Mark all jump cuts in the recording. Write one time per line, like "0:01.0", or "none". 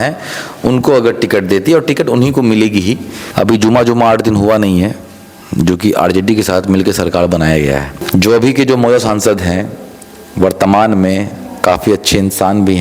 0:03.1
0:07.9